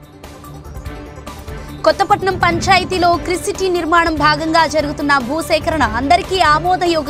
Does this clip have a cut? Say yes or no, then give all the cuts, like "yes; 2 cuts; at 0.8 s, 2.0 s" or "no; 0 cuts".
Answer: yes; 1 cut; at 1.4 s